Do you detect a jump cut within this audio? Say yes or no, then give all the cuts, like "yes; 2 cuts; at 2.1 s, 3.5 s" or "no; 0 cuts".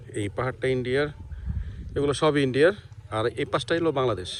no; 0 cuts